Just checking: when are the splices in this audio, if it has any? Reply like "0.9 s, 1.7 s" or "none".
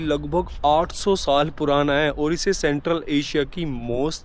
none